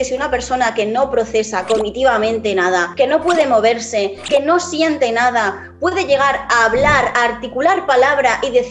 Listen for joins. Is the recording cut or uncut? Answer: uncut